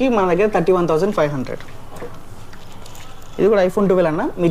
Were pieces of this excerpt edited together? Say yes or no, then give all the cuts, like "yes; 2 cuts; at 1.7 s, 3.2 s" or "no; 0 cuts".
no; 0 cuts